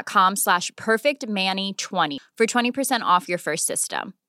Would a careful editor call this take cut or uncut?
cut